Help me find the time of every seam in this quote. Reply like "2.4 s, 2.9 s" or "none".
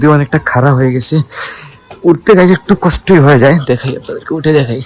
none